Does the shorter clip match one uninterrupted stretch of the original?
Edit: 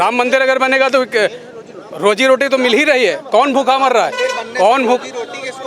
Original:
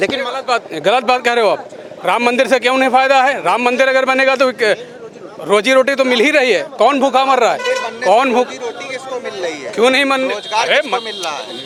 yes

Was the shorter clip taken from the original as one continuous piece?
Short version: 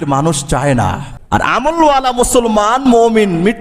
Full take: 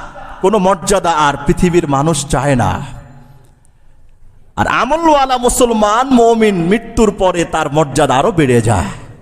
no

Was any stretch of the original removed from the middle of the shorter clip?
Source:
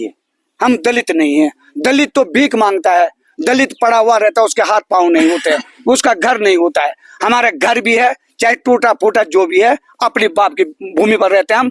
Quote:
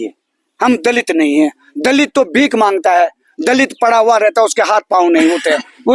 no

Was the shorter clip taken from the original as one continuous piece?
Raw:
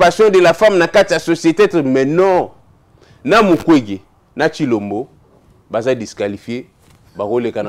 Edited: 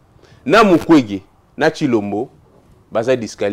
yes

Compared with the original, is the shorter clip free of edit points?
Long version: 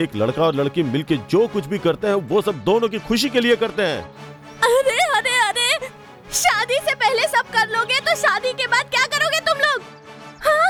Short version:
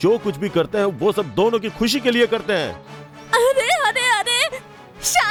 yes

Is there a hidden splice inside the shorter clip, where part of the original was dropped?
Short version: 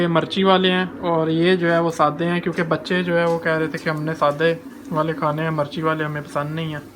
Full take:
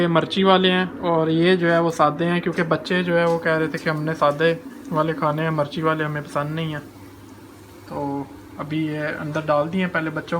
no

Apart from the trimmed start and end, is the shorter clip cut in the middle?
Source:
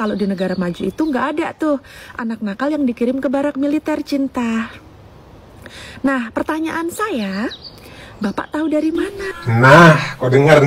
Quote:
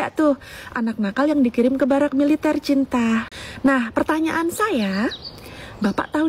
yes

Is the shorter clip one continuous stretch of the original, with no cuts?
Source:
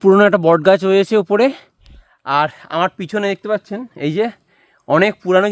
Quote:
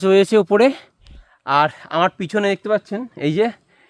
yes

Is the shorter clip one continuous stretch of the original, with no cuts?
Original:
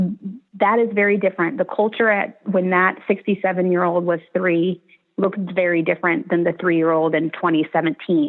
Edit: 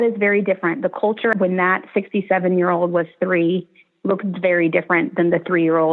no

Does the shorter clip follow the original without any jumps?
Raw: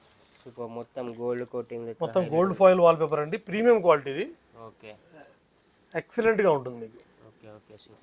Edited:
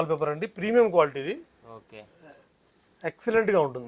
yes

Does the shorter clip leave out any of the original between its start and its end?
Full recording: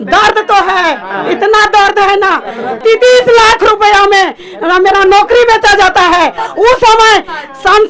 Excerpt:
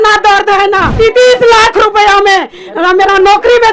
yes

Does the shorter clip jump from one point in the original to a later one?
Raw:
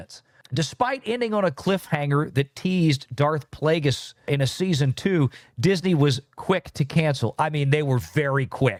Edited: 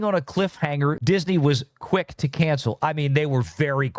yes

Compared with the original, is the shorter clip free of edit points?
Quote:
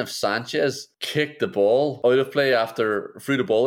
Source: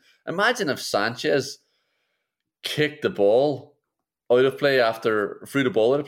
no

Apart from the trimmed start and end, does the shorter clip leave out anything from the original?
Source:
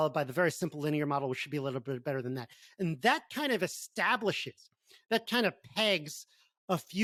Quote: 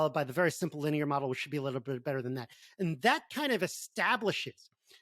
no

